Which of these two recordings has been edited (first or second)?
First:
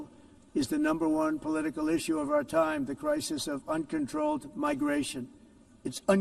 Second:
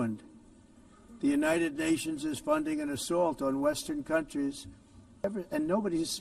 second